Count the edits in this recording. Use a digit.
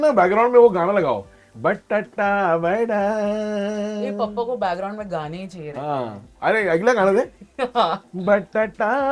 0